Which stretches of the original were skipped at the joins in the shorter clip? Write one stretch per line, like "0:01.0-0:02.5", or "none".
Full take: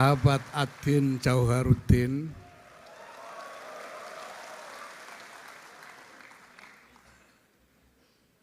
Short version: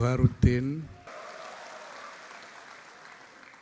0:02.5-0:03.8

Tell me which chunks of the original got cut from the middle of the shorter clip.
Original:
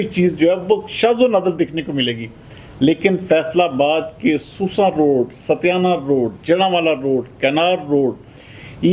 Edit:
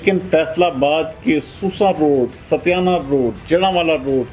none

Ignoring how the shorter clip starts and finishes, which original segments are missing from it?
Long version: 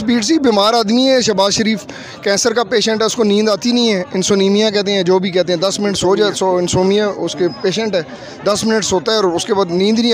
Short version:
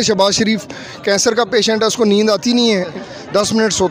0:04.2-0:08.1

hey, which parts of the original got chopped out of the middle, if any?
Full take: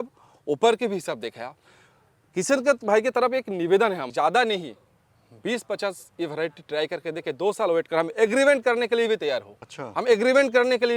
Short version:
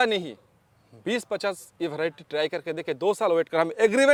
none

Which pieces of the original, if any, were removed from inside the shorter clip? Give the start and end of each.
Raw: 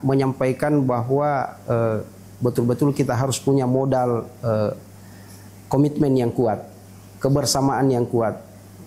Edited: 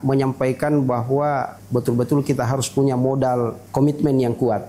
0:01.5-0:02.2
0:04.3-0:05.6

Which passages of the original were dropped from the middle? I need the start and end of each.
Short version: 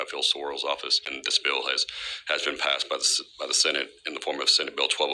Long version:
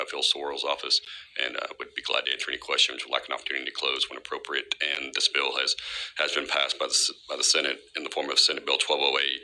0:01.1-0:05.0

